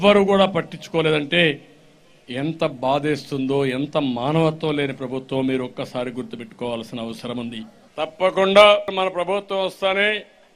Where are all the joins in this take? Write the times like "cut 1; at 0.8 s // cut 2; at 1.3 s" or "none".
cut 1; at 7.8 s // cut 2; at 8.9 s